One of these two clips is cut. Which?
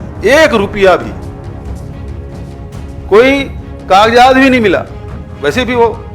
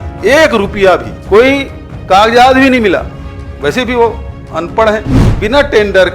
second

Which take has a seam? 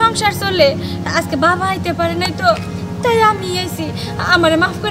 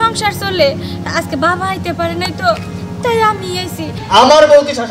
second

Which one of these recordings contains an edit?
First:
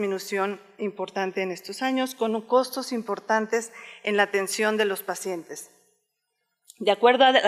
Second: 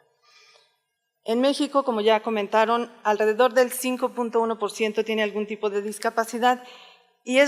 second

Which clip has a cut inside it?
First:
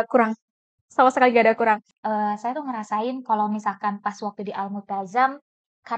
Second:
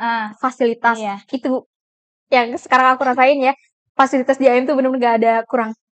first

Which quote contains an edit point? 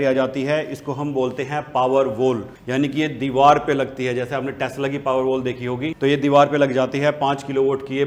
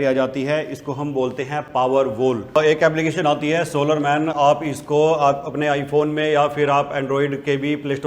second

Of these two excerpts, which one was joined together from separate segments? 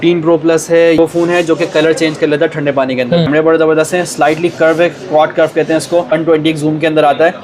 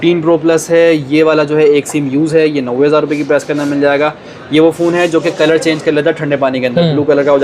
first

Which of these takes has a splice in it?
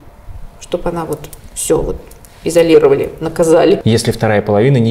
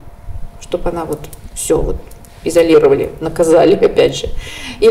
first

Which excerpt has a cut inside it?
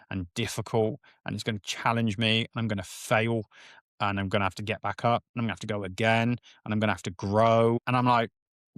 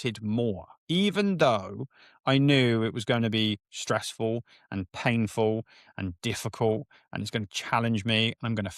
first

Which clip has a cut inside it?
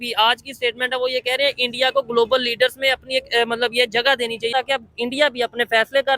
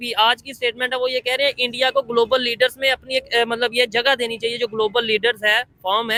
first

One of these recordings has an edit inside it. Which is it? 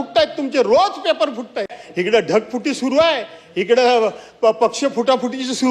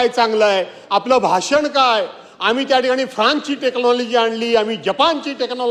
first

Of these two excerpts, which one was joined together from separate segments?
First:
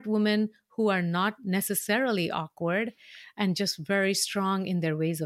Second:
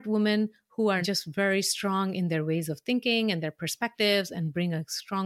second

